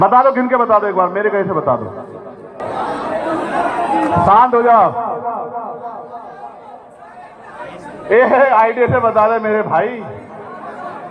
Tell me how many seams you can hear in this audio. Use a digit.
1